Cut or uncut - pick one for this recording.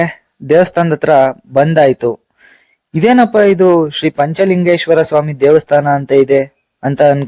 uncut